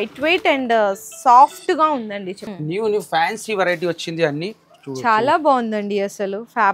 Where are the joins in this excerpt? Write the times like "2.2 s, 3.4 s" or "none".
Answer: 2.4 s